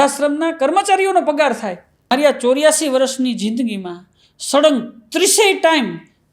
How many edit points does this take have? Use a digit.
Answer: 1